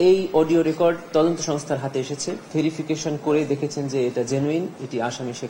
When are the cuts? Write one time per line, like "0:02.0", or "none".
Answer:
0:02.4